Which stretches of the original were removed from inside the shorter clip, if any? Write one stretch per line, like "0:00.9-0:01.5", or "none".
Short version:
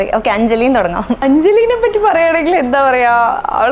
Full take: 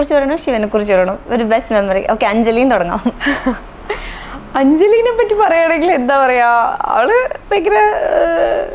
0:03.1-0:04.5